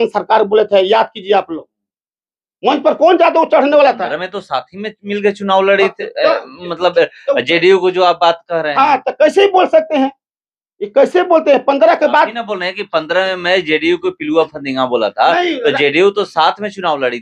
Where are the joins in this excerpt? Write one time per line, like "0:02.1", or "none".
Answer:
none